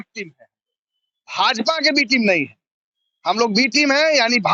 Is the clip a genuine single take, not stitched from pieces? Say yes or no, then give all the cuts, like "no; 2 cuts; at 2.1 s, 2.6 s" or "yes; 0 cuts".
yes; 0 cuts